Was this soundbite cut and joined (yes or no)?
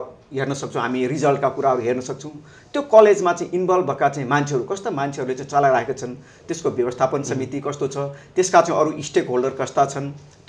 no